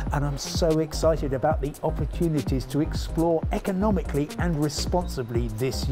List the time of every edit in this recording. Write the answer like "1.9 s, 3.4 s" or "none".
none